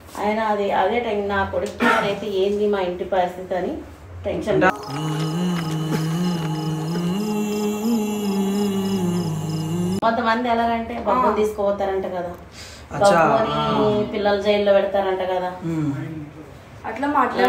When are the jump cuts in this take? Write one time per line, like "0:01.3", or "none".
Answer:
none